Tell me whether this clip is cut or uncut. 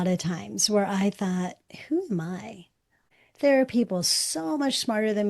cut